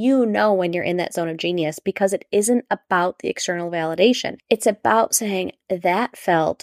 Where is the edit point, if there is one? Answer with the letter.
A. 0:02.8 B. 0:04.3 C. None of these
B